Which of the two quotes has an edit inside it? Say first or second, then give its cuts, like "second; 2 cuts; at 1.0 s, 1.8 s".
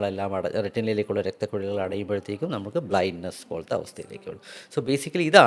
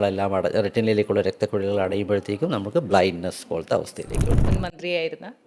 second; 1 cut; at 4.4 s